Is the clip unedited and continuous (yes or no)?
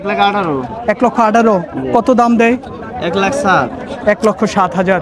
yes